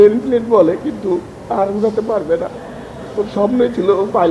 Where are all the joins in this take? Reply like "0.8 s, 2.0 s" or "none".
none